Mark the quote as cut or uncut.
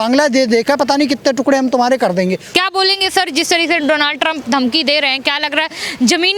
cut